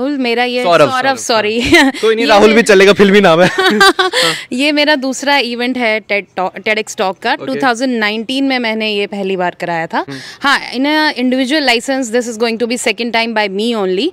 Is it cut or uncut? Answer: uncut